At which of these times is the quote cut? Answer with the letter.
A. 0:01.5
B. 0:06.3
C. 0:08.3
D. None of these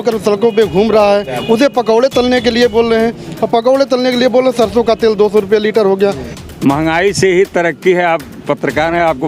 B